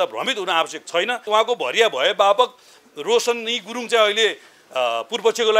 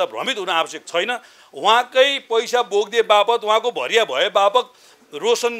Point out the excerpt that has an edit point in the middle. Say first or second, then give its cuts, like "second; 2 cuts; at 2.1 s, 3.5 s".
first; 1 cut; at 1.3 s